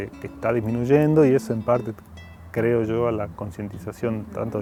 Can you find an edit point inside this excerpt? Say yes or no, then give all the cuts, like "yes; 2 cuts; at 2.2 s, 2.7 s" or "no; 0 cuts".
no; 0 cuts